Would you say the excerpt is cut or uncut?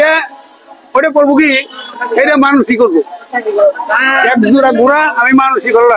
uncut